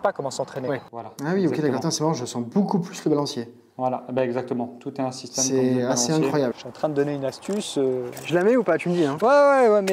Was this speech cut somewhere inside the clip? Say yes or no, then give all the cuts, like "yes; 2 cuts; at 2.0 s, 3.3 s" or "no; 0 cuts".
yes; 2 cuts; at 1.0 s, 6.6 s